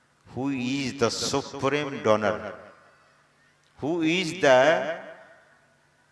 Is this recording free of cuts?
yes; 0 cuts

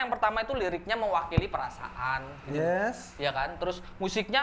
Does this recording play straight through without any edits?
yes; 0 cuts

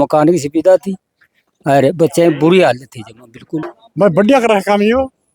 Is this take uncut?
no; 1 cut; at 3.7 s

